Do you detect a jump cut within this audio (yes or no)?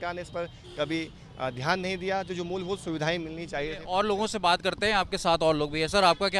no